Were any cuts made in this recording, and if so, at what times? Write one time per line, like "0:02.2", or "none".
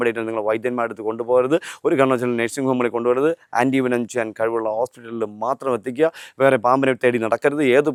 none

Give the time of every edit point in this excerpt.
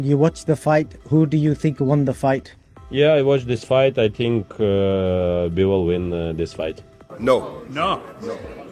0:07.0

